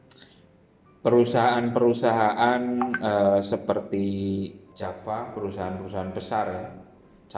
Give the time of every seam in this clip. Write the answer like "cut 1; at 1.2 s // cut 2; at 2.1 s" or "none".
cut 1; at 4.6 s